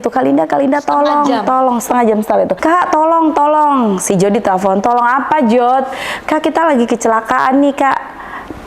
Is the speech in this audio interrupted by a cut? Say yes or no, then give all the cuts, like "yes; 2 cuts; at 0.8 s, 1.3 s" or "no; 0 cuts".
yes; 1 cut; at 2.6 s